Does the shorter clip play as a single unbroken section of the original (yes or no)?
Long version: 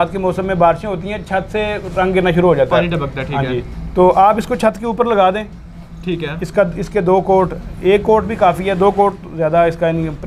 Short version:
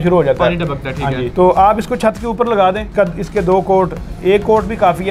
no